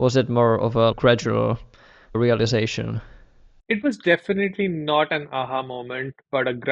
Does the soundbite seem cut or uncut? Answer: cut